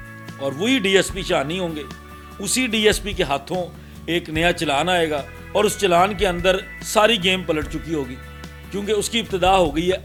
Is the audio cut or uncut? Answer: uncut